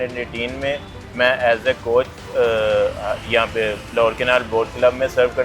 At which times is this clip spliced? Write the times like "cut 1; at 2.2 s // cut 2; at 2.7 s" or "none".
none